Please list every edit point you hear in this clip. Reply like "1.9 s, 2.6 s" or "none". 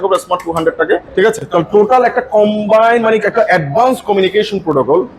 1.1 s